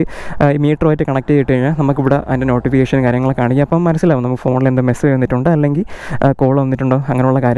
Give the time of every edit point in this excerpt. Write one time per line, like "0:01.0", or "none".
none